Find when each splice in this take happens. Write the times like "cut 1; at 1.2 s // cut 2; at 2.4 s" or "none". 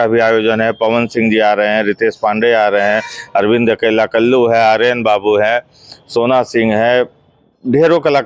none